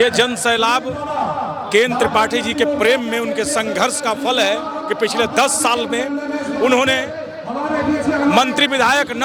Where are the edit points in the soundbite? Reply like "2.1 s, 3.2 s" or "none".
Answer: none